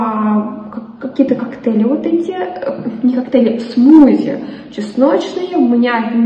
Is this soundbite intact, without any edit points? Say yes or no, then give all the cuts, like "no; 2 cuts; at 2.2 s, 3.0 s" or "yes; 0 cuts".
yes; 0 cuts